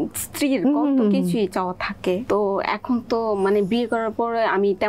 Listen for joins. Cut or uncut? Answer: cut